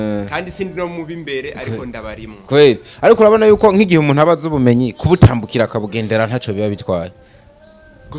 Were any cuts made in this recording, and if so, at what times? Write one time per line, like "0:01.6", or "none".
none